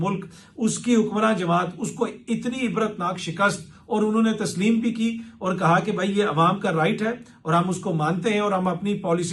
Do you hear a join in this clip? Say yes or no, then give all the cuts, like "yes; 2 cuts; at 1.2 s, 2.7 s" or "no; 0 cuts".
no; 0 cuts